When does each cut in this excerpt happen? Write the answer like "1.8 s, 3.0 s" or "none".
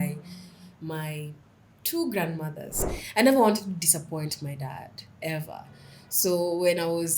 2.8 s